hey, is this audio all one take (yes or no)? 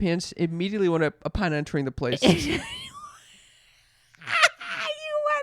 yes